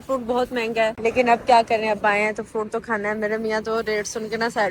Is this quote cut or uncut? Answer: cut